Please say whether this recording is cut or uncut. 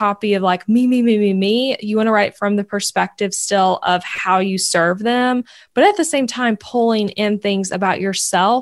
uncut